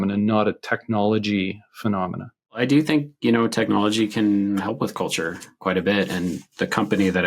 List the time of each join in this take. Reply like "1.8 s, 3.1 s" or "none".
2.6 s